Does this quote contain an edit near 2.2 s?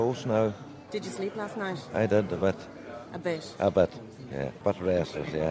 no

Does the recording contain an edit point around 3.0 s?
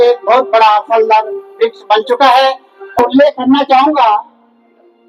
yes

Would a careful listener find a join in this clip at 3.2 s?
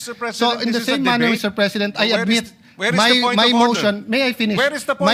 no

